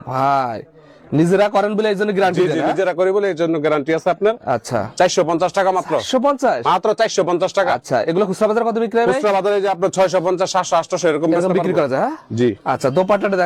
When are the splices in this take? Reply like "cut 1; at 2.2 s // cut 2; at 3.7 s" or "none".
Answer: none